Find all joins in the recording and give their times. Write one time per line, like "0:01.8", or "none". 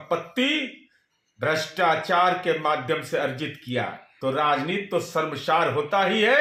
0:04.0